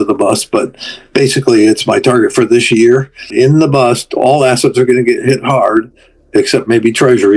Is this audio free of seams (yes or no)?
no